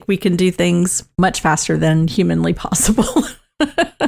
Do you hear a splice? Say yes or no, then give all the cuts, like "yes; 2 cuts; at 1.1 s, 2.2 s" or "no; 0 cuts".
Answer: yes; 1 cut; at 1.0 s